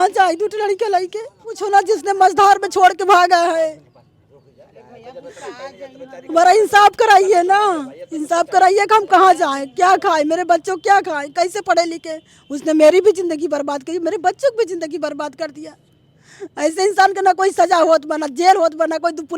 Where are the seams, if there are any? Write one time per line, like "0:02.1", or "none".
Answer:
0:01.5

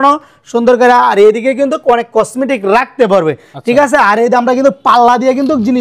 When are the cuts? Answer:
none

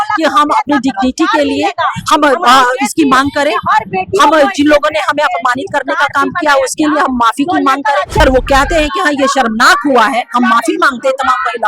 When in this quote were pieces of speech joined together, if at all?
0:08.2

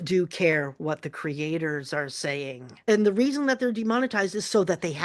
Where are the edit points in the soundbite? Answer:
none

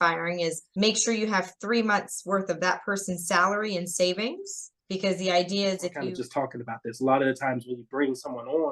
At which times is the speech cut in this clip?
0:06.0

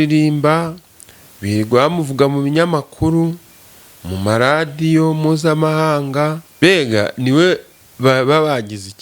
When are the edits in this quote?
0:06.4

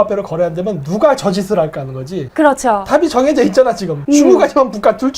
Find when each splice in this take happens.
0:02.2
0:03.9

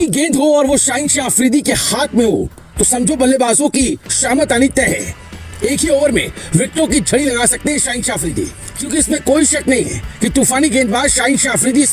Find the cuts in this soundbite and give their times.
none

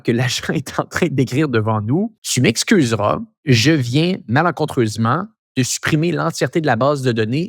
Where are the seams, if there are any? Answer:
0:02.2
0:03.3

